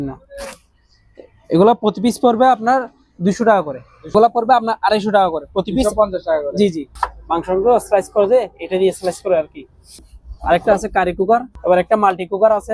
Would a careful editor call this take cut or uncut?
cut